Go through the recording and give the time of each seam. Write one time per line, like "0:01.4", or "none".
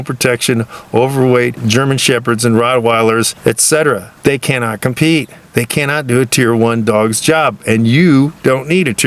0:01.6
0:03.3
0:04.1